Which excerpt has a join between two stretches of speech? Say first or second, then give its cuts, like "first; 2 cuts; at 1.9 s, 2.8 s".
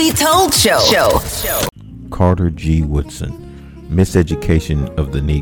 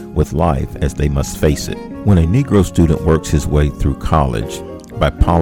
first; 1 cut; at 1.8 s